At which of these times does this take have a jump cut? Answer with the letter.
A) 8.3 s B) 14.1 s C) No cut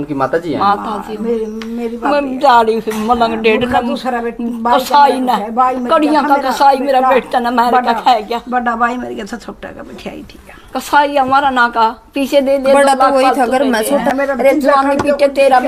B